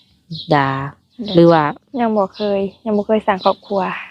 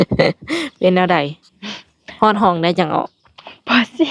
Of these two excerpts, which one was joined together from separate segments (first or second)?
first